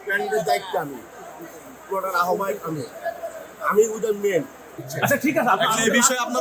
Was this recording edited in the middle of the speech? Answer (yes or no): yes